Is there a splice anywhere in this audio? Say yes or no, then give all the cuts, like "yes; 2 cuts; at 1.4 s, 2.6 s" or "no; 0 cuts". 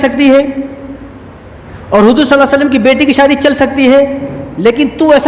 no; 0 cuts